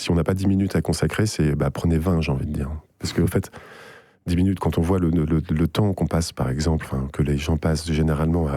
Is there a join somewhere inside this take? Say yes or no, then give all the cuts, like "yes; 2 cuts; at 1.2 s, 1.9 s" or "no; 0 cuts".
no; 0 cuts